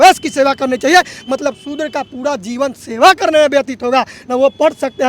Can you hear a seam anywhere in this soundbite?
no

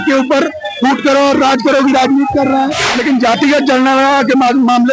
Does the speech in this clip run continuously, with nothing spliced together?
no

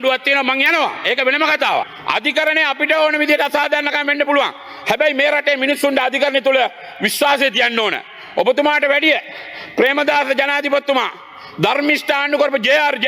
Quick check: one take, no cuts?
no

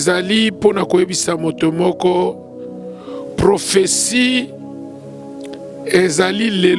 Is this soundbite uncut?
yes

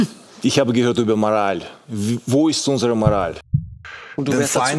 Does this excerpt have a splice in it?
yes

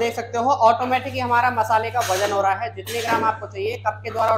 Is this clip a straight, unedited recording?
yes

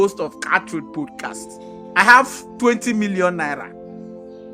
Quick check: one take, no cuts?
no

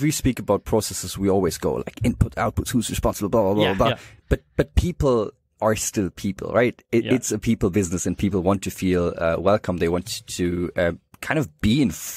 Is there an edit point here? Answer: no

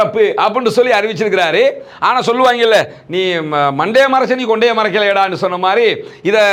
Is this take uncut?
yes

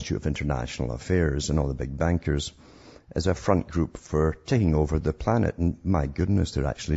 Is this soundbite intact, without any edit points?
no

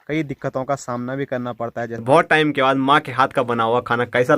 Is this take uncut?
no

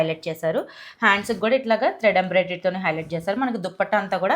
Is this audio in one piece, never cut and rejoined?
yes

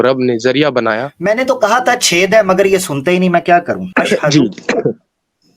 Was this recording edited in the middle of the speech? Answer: yes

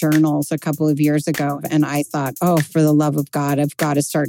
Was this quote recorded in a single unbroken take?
no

